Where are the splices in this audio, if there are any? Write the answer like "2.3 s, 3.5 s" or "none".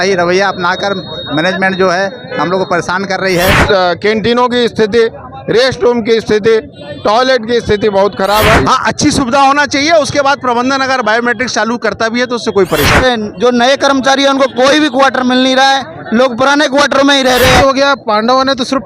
3.6 s, 8.6 s, 13.0 s, 17.6 s